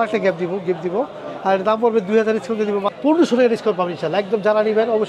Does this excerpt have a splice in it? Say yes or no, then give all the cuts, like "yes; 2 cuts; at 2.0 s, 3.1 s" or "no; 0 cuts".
yes; 1 cut; at 2.9 s